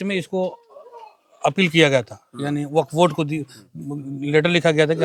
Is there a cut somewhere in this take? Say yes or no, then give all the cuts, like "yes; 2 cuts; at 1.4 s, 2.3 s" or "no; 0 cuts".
no; 0 cuts